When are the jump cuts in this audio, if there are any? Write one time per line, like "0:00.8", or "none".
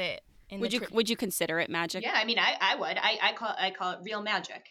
0:02.0

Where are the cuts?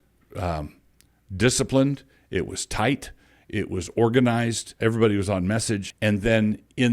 0:04.7
0:05.9

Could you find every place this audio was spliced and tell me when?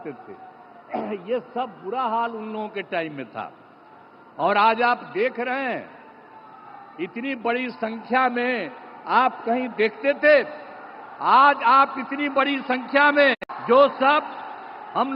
none

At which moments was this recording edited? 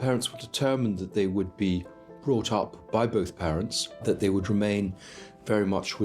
0:04.0

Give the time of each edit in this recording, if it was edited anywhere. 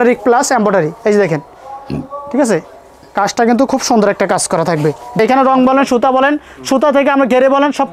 0:05.2

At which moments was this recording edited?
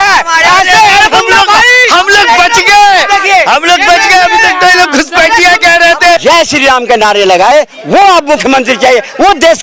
0:06.2

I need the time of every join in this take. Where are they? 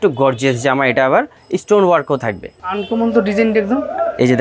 0:01.4

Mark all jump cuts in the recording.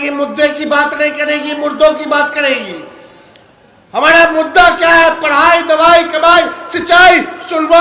none

